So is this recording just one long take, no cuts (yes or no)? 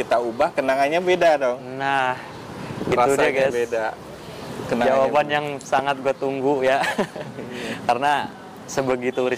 yes